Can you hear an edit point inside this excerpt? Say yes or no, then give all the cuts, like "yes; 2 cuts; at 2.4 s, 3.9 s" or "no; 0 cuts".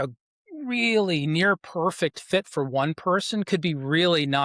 no; 0 cuts